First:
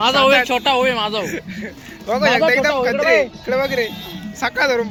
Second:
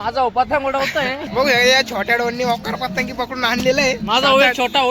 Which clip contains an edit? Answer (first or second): second